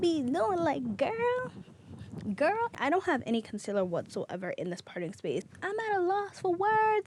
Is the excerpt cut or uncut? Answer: cut